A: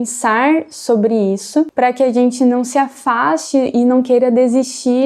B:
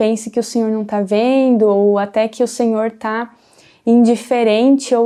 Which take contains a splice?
A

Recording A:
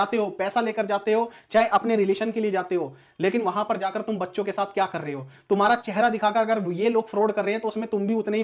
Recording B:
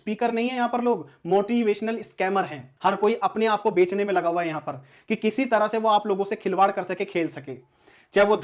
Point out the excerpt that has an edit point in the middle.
B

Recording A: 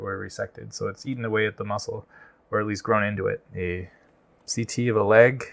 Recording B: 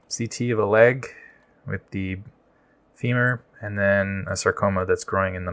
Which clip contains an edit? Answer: A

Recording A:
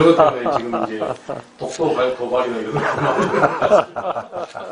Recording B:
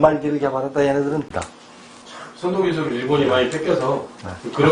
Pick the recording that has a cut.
B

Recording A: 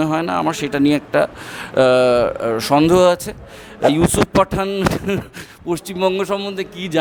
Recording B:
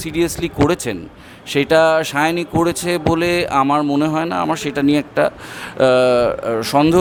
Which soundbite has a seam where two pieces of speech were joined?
A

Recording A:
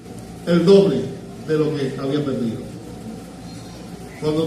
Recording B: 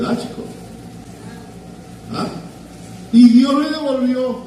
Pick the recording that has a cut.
B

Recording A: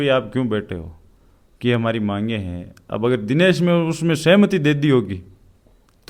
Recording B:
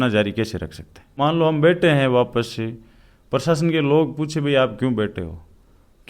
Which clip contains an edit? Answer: B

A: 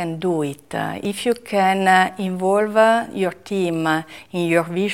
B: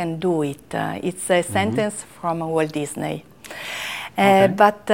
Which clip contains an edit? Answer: A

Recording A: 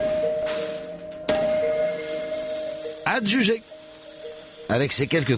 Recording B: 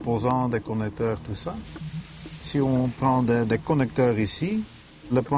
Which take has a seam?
B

